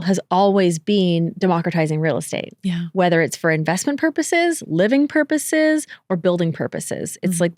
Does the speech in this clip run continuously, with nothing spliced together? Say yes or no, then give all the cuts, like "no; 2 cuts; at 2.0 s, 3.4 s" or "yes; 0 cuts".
yes; 0 cuts